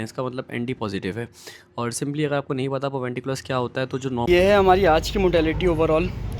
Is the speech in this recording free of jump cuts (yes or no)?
no